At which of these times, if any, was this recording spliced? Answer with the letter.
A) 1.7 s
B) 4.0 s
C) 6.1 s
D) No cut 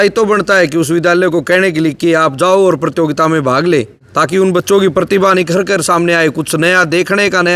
D